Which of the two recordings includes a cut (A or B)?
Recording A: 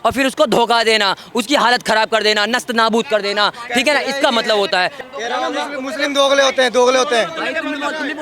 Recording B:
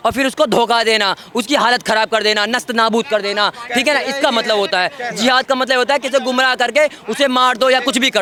A